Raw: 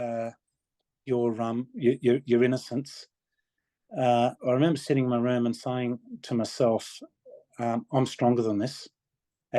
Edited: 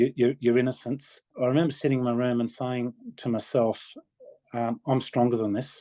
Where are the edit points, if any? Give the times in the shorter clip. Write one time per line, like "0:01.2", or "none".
0:01.3